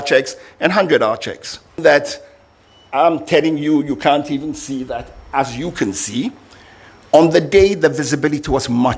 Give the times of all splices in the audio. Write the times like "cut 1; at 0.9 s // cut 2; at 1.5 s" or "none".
cut 1; at 1.8 s